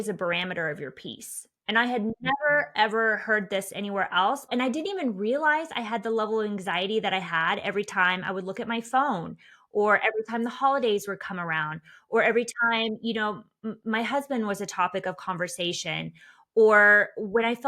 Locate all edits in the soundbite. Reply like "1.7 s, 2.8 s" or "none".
4.5 s